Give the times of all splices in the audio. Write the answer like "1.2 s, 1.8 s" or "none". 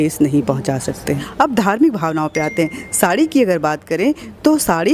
1.2 s